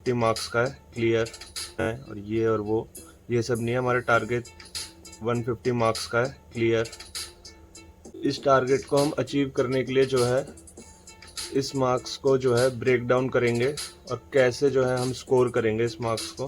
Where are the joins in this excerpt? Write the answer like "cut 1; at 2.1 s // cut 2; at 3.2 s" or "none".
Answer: cut 1; at 1.8 s // cut 2; at 8.0 s